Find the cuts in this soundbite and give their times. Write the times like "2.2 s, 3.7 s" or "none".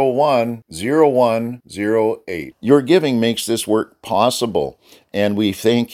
none